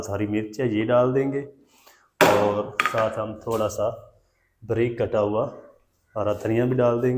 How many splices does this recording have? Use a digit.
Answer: 0